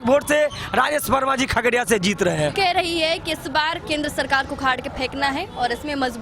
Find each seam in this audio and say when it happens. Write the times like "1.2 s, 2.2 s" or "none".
none